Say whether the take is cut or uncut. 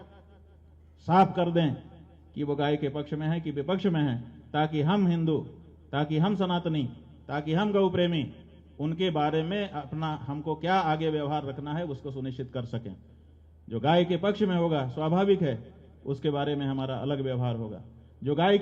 uncut